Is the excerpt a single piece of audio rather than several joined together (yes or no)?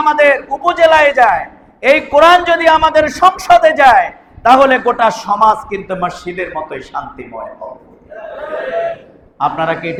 yes